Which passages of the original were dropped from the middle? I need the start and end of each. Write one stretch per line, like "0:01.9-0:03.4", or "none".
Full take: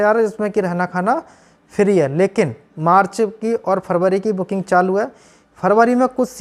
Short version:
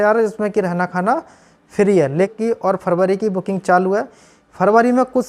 0:02.3-0:03.3